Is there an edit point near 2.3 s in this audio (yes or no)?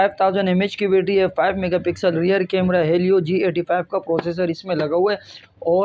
no